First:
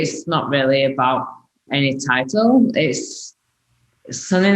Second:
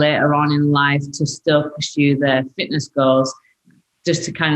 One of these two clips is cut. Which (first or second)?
first